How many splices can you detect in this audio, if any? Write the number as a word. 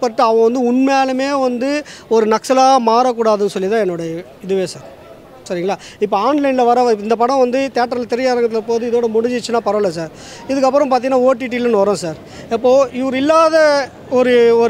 zero